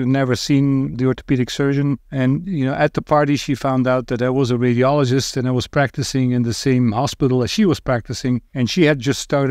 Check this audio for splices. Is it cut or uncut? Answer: cut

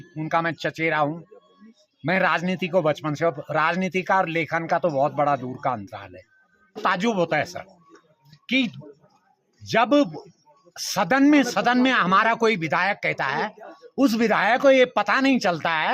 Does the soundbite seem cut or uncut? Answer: cut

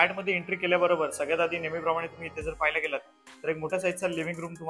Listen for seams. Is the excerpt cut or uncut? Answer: uncut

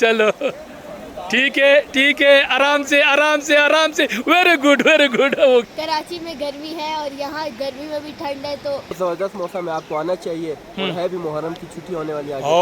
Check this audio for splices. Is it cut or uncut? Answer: cut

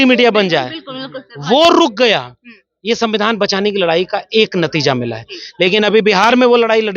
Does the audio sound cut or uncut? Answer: uncut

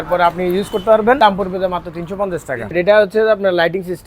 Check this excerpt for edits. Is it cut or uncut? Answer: cut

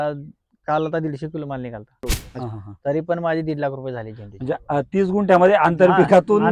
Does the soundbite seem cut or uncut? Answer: cut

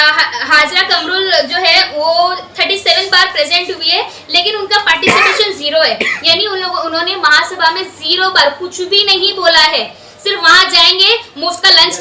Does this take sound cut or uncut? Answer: uncut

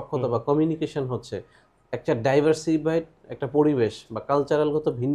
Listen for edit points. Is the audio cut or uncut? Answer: uncut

